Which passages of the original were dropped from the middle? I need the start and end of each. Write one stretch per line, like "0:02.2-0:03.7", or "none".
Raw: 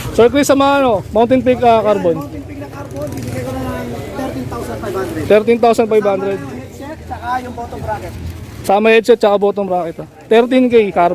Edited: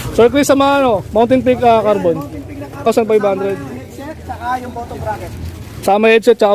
0:02.9-0:05.7